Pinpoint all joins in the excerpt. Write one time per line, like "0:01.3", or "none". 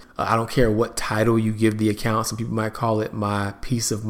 none